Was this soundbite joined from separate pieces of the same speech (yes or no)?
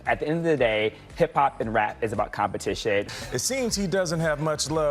yes